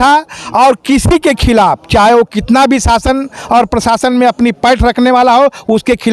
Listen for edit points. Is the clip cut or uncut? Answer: uncut